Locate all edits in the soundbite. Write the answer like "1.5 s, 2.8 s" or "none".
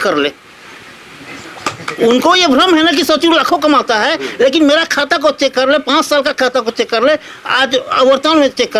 none